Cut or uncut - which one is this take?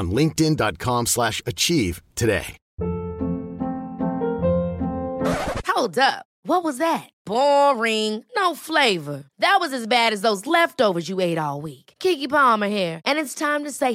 cut